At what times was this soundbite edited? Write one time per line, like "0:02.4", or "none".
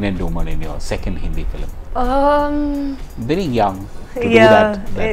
0:01.7

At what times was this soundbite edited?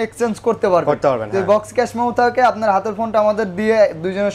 none

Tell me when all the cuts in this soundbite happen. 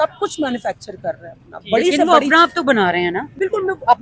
none

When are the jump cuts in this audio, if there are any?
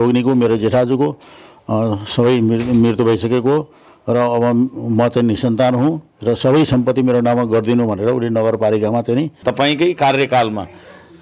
0:09.4

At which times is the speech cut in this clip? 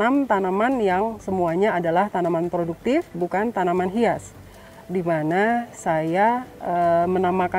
0:06.5

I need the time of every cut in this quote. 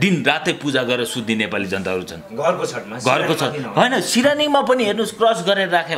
none

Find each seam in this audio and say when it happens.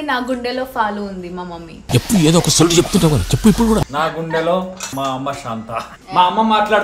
0:01.8
0:03.9
0:04.9
0:06.0

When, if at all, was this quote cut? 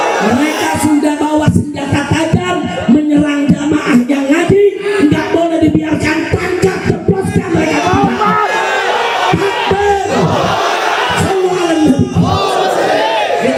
none

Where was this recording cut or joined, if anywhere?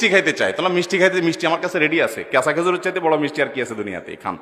none

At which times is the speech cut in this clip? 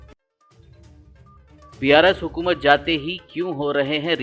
0:01.1

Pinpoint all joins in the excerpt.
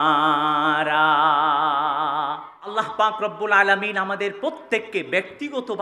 0:02.7

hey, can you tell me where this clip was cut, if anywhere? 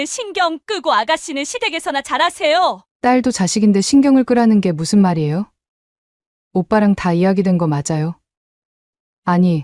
0:02.9

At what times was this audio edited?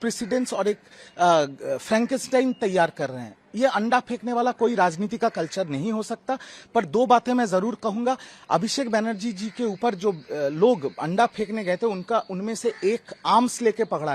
none

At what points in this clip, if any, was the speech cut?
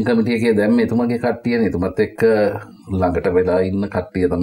none

